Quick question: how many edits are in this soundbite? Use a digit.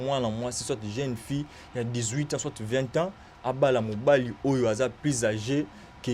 0